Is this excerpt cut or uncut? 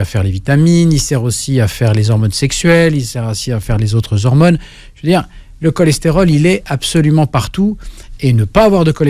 uncut